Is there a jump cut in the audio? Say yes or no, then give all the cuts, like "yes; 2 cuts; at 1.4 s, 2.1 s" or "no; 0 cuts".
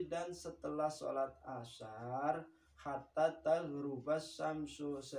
no; 0 cuts